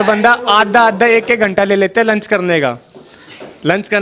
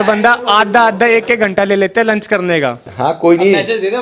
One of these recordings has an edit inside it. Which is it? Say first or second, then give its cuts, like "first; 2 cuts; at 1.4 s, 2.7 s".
second; 1 cut; at 2.9 s